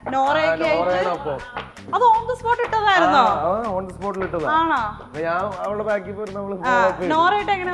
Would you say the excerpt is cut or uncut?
cut